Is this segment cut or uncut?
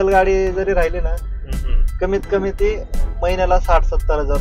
uncut